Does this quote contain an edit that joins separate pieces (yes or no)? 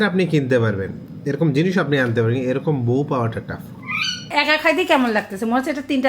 yes